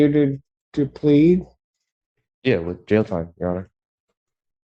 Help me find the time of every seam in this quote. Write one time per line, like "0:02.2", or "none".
none